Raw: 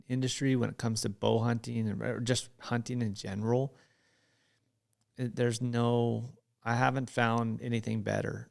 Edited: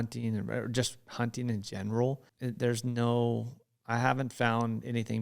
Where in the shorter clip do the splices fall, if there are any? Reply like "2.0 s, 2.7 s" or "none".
2.3 s